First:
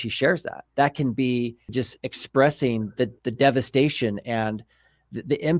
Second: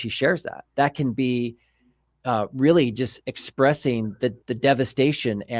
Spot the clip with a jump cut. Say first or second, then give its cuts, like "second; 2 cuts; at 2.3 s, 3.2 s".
first; 1 cut; at 1.7 s